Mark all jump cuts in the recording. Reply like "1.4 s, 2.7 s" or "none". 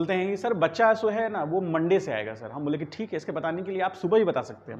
none